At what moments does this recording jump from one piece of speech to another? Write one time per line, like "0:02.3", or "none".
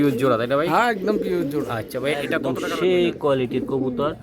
0:02.4